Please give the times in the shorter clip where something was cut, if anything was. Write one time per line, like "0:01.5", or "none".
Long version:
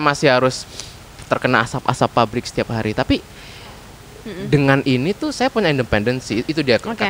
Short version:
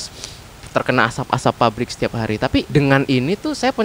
0:02.7

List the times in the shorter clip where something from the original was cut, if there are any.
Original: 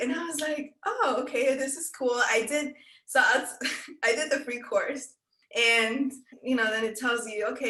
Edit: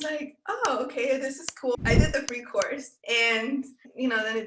0:01.8
0:02.9

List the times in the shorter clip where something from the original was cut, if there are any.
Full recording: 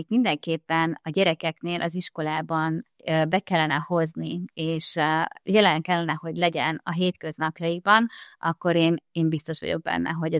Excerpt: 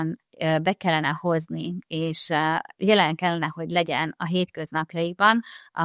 none

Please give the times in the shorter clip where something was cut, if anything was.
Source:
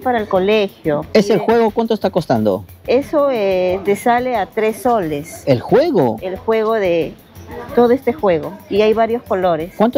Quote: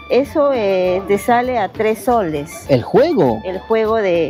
none

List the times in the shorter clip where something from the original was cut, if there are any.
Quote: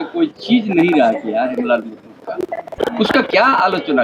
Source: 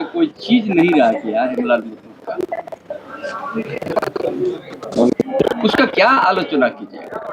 0:02.8

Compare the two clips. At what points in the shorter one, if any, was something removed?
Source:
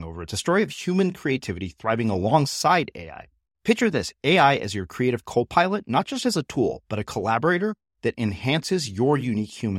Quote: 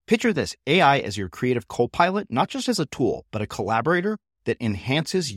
none

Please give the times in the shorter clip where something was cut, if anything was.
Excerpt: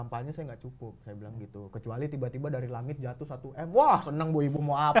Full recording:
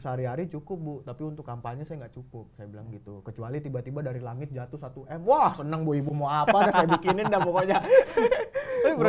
none

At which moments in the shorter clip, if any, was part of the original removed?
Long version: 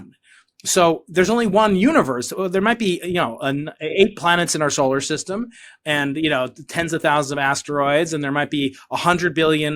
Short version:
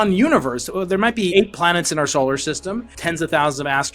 0:01.3
0:02.9

